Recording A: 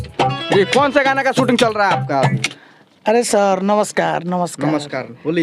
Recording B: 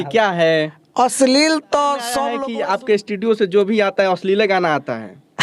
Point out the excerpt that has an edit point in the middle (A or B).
B